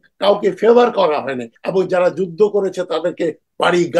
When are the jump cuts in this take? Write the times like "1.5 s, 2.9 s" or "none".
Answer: 1.6 s